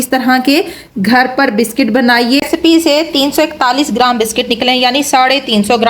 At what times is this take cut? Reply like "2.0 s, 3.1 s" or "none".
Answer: 2.5 s